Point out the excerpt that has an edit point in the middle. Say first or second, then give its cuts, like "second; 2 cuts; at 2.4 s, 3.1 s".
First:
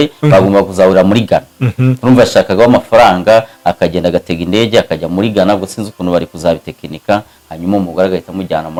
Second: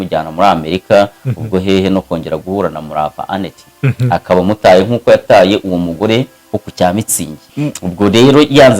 second; 1 cut; at 7.4 s